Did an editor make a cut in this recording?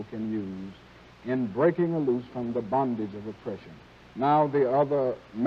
no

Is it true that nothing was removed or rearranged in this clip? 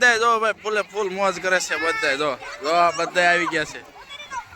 yes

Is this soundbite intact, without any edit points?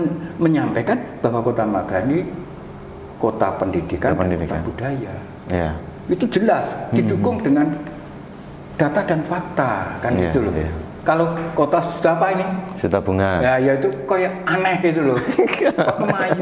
yes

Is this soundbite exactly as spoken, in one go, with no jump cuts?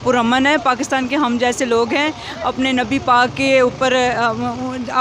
yes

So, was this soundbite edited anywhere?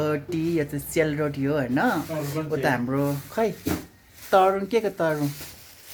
no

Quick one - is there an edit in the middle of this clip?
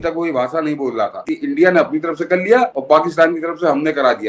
yes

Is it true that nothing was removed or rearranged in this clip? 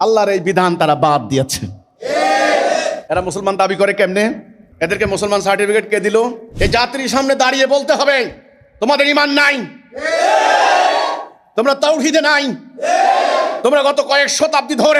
no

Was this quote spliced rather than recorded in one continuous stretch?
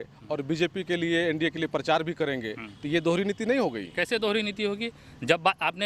no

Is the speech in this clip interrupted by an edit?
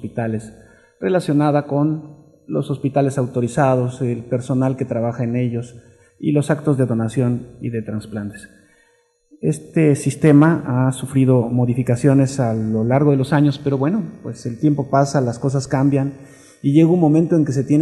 yes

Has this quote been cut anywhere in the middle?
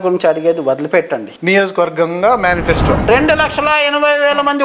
yes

